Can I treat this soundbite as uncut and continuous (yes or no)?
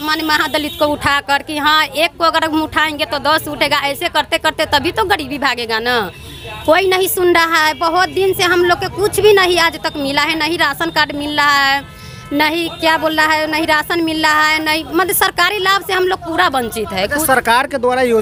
yes